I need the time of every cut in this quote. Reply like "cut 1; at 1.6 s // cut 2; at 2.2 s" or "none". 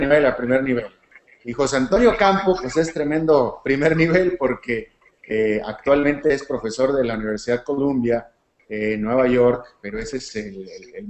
cut 1; at 8.3 s